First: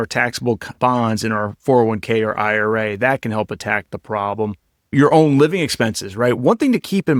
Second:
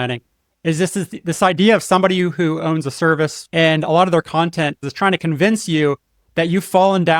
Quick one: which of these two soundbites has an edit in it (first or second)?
second